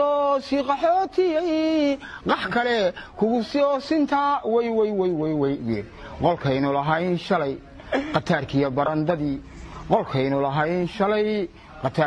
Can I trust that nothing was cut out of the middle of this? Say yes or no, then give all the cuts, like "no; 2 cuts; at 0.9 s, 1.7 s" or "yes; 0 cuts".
yes; 0 cuts